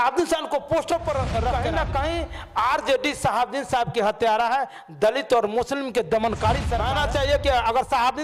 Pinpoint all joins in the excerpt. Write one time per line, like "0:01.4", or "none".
0:01.5
0:06.8